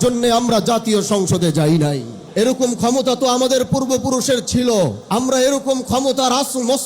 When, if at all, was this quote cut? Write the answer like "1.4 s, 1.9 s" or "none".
2.1 s, 5.0 s